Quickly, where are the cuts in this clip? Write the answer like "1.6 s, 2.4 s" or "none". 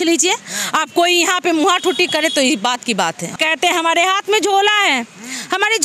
3.4 s